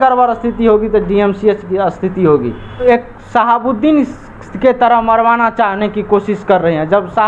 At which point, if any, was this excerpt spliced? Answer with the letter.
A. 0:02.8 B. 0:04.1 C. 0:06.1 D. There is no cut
A